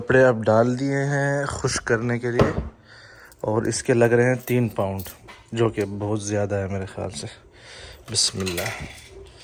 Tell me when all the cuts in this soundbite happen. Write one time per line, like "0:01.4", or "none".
none